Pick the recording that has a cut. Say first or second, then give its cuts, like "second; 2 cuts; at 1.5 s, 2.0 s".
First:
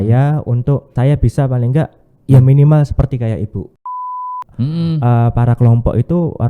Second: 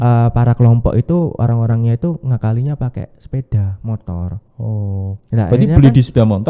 first; 2 cuts; at 0.9 s, 4.1 s